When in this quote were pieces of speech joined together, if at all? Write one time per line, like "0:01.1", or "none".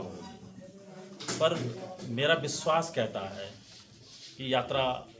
none